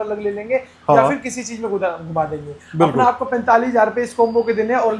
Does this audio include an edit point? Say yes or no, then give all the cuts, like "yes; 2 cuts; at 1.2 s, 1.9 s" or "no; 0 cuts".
no; 0 cuts